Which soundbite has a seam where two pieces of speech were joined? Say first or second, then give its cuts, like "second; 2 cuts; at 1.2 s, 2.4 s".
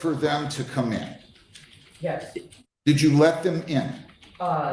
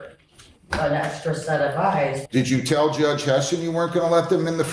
second; 1 cut; at 2.2 s